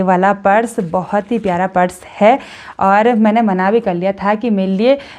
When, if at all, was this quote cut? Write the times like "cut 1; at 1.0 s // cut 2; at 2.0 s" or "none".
none